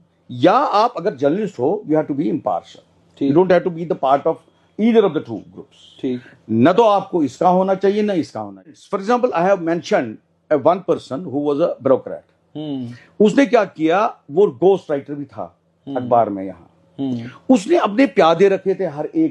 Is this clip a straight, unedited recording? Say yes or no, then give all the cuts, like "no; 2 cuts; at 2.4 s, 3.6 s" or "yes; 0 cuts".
no; 1 cut; at 8.7 s